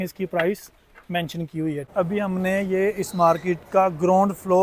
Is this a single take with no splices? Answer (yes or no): no